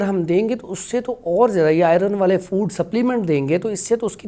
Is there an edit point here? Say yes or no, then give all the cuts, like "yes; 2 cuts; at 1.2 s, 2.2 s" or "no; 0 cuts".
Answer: no; 0 cuts